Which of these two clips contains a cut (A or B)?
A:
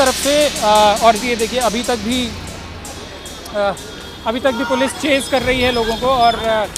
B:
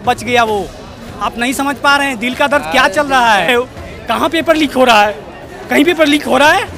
B